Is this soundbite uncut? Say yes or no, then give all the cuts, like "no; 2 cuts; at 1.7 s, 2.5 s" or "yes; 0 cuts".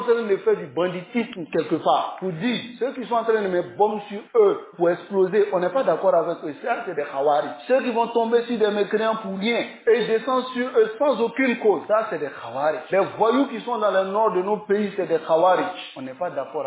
no; 1 cut; at 2.7 s